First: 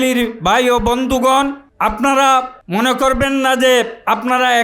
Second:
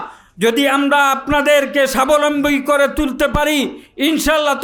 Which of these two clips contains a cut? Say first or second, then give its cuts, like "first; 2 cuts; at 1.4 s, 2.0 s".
first; 2 cuts; at 1.6 s, 2.6 s